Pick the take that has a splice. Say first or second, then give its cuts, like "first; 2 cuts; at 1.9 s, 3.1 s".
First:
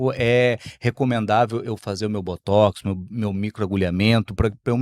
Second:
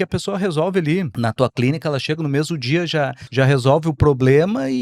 second; 2 cuts; at 1.1 s, 3.2 s